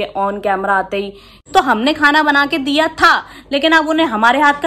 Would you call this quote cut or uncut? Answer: cut